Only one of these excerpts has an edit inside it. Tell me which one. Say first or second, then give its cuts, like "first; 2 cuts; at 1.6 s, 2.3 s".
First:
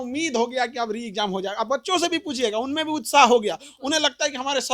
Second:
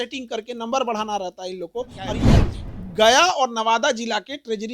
second; 1 cut; at 2.2 s